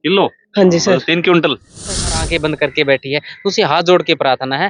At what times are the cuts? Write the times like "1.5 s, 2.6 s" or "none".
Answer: 1.9 s